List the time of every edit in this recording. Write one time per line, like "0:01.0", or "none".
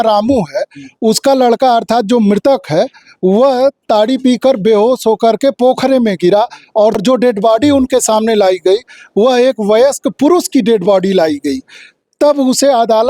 0:07.0